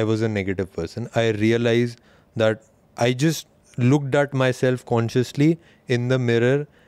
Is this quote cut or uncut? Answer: uncut